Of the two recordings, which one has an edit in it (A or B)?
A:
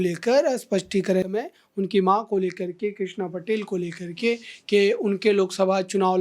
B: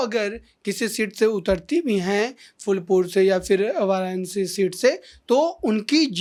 A